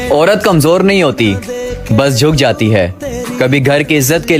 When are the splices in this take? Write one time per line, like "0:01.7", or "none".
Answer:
none